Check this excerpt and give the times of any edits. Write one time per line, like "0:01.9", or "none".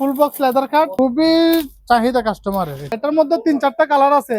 0:00.9
0:03.0